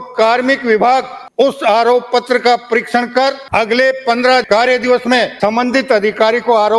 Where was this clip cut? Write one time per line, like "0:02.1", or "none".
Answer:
0:01.2
0:03.4
0:04.4
0:05.3